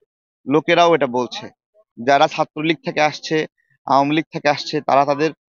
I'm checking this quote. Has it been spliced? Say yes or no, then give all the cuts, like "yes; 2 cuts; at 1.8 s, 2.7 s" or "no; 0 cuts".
yes; 1 cut; at 1.8 s